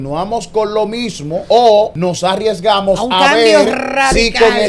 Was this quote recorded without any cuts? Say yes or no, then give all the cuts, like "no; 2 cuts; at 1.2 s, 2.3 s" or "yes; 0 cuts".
no; 2 cuts; at 1.4 s, 1.9 s